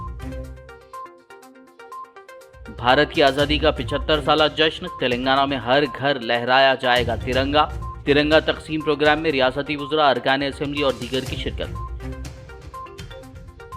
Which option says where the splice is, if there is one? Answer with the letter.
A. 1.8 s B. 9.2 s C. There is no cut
A